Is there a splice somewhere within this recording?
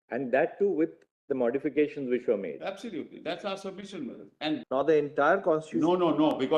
yes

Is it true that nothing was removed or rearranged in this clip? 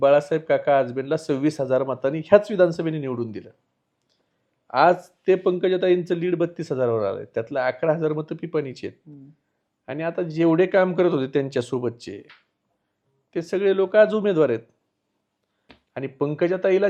yes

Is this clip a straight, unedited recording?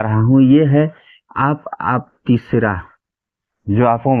yes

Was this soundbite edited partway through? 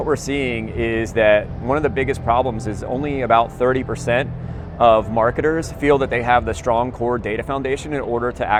no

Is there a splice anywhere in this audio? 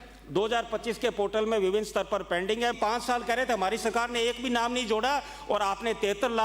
yes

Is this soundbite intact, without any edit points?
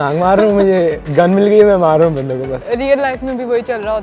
yes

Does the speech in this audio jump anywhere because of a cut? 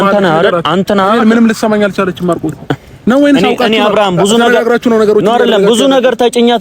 no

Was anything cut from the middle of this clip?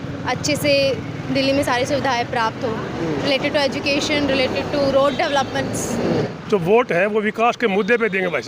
yes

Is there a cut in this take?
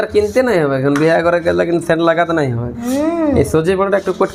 no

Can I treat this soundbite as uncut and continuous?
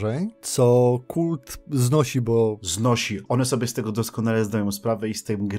no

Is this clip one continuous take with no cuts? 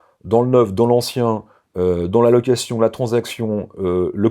yes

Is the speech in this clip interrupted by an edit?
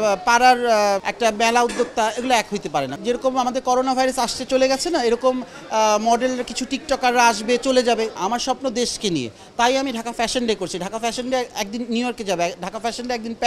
yes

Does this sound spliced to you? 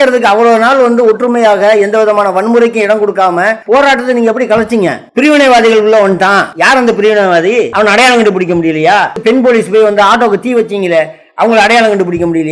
yes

